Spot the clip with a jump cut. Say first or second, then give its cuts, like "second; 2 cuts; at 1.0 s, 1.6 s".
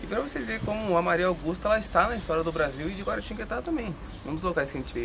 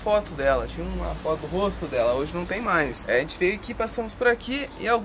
second; 1 cut; at 3.0 s